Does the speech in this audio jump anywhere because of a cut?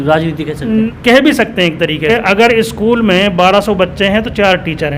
yes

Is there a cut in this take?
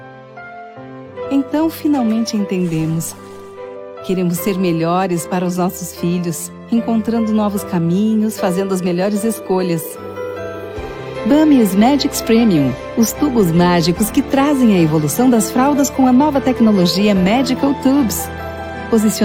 no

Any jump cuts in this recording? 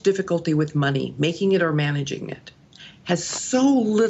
no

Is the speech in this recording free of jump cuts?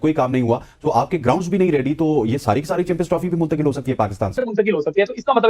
no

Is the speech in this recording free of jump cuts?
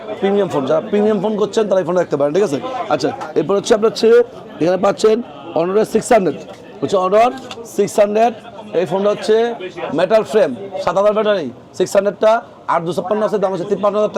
yes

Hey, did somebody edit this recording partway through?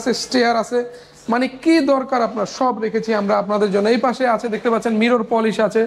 no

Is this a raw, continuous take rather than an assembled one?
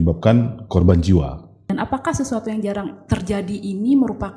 no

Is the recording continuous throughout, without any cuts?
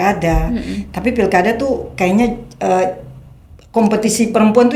yes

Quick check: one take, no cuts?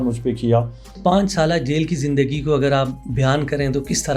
no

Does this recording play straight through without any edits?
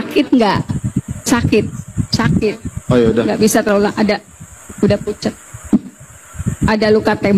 no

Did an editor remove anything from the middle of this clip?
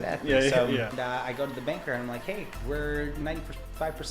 yes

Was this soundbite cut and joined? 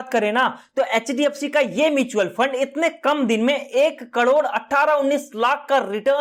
no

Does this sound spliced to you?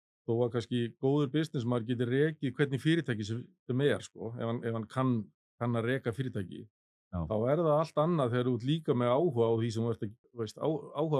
yes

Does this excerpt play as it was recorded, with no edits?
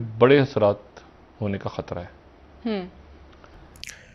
yes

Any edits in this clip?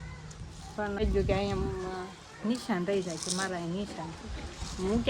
yes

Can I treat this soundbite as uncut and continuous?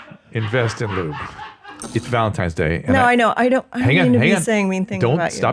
no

